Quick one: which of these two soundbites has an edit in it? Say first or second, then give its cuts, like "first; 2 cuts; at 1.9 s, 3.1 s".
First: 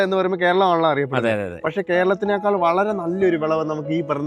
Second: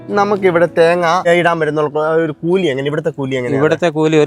second; 1 cut; at 1.2 s